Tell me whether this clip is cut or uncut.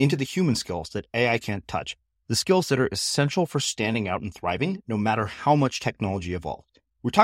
uncut